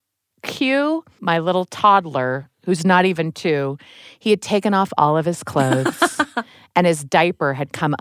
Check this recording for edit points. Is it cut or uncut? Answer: cut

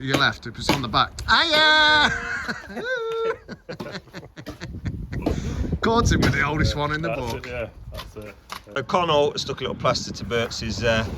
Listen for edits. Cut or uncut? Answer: cut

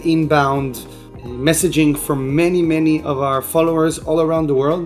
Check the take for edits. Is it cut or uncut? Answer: uncut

